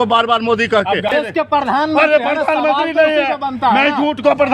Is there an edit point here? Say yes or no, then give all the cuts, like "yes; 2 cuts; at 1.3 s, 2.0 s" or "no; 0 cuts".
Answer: yes; 1 cut; at 1.2 s